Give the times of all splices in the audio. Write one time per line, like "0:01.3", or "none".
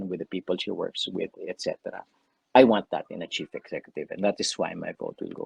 none